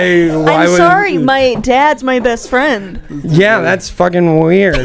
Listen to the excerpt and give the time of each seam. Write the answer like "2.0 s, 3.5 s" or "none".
none